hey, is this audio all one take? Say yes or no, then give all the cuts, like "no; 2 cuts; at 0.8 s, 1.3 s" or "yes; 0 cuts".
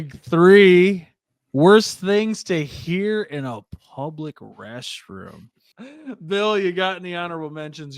no; 1 cut; at 5.6 s